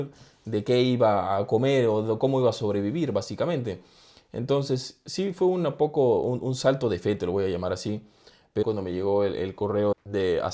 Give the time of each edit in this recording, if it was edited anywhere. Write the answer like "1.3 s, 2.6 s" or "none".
8.6 s